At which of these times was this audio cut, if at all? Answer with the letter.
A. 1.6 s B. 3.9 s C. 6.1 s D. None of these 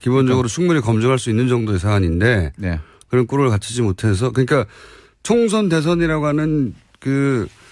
B